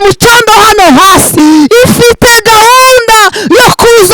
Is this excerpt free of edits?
no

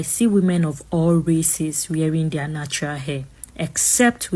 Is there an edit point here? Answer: no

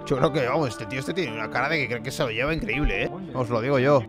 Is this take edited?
yes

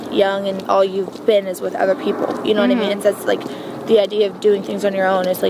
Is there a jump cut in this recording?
no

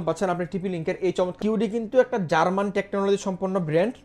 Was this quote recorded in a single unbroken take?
no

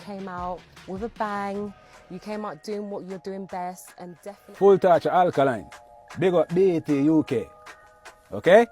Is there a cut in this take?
yes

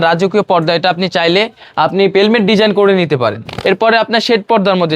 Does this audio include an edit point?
yes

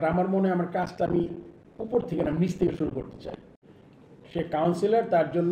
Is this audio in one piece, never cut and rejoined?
no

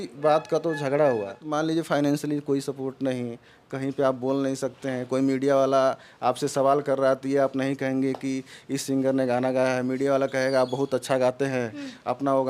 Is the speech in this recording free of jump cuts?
no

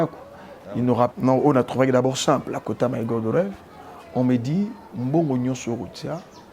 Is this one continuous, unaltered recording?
no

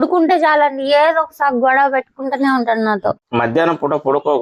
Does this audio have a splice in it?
no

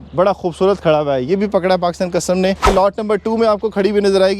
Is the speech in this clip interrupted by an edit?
yes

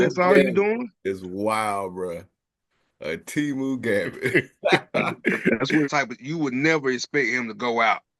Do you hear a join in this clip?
yes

